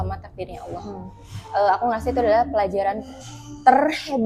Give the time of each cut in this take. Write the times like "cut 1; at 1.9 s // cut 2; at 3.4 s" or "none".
none

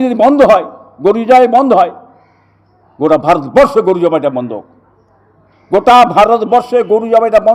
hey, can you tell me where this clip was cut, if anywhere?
none

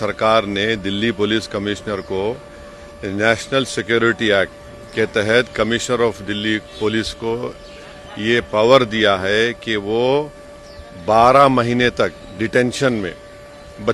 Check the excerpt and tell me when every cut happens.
none

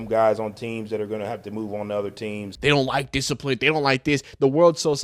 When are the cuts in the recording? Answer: cut 1; at 2.5 s

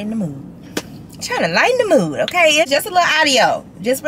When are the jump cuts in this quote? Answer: cut 1; at 2.7 s

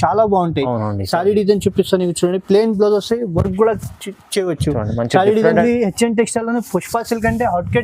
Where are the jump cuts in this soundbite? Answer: cut 1; at 5.6 s

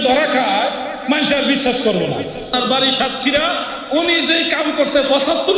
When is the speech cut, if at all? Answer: cut 1; at 2.6 s

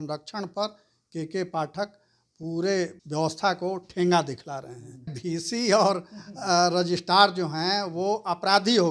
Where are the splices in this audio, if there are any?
cut 1; at 3.0 s // cut 2; at 5.2 s

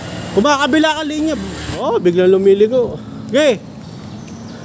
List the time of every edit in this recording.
cut 1; at 1.6 s

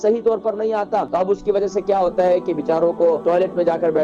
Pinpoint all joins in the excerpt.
cut 1; at 1.1 s // cut 2; at 3.2 s

